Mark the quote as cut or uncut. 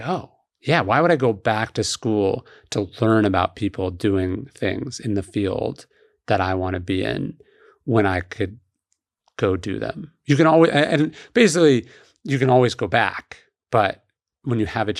uncut